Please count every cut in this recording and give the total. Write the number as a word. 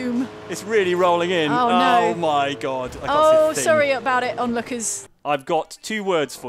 one